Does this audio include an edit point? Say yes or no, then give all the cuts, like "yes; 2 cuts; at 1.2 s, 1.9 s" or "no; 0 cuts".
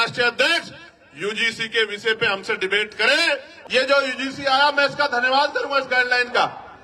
yes; 1 cut; at 3.5 s